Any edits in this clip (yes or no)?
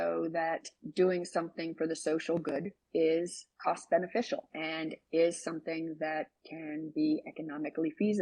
yes